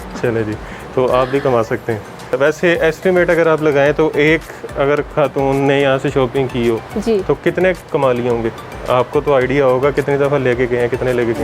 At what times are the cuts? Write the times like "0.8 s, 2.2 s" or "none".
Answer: 2.4 s